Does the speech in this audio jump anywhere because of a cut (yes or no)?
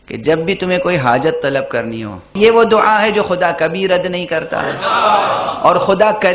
yes